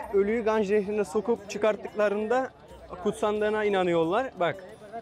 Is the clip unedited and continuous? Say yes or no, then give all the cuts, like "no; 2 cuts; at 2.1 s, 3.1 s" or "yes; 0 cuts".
yes; 0 cuts